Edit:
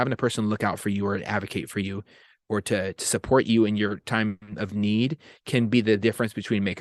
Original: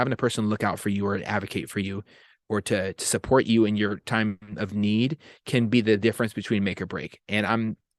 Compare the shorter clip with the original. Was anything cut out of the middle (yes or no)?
no